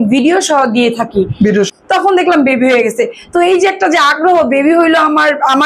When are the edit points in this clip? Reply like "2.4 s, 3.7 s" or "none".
1.7 s